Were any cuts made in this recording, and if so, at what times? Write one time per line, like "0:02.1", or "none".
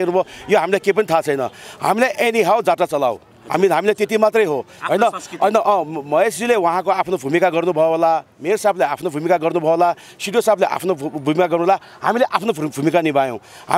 none